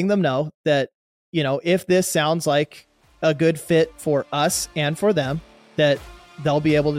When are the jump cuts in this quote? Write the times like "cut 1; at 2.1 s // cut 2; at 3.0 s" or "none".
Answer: none